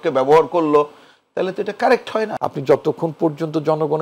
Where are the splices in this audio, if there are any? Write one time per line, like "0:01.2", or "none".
0:02.3